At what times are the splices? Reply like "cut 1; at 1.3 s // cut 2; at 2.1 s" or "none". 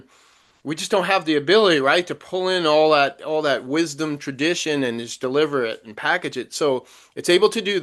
none